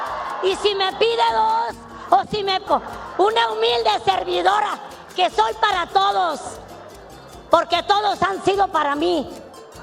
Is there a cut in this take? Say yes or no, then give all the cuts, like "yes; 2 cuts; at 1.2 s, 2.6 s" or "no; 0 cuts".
yes; 1 cut; at 2.6 s